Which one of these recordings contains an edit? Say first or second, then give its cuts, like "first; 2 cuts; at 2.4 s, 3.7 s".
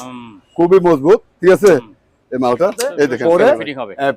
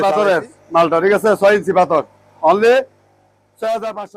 first; 1 cut; at 3.2 s